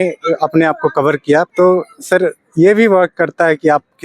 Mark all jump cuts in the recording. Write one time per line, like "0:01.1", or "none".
0:01.5